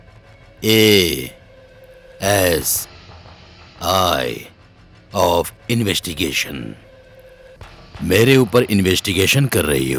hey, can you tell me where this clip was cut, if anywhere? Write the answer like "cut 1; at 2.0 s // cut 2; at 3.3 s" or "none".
none